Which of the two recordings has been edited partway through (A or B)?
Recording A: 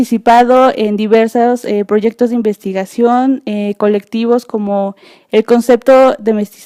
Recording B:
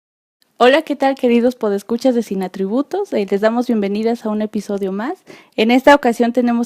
B